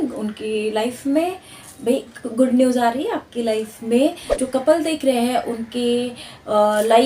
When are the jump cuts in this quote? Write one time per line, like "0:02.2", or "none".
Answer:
0:04.4